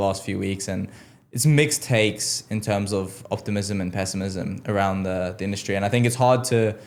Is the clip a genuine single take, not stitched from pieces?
yes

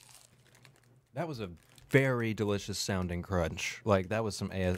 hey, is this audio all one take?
yes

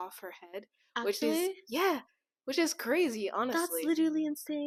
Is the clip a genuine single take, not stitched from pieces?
yes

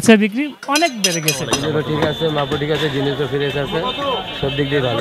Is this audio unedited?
no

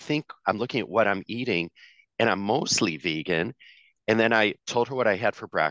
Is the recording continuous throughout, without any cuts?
yes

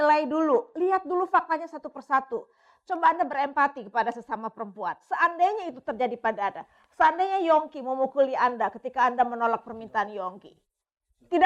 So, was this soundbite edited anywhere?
no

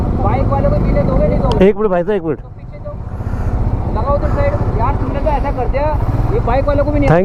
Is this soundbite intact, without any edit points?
yes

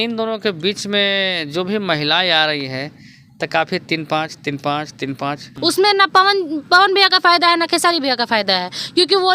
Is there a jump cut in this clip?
yes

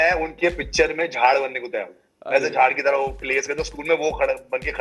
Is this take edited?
no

